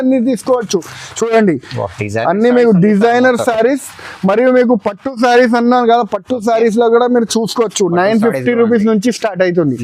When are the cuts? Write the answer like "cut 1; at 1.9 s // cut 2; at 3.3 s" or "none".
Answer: none